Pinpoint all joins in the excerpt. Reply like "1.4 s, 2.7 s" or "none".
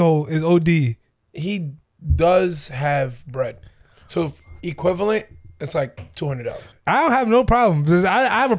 6.6 s